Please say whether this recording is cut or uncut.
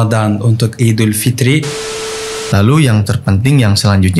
cut